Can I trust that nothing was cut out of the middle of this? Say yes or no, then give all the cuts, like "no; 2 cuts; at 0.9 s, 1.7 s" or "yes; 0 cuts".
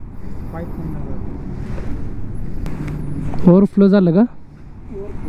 no; 1 cut; at 2.7 s